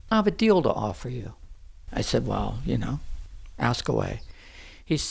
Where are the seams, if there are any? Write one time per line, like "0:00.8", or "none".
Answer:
0:01.8